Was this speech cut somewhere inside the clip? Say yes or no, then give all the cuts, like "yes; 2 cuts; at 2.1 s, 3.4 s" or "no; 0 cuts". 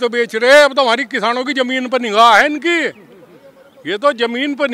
no; 0 cuts